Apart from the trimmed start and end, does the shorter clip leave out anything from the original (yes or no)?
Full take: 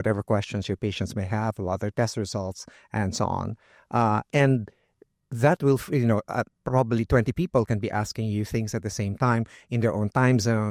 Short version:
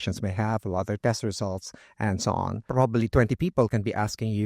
yes